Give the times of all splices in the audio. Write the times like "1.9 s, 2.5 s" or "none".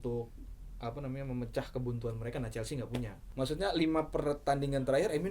3.2 s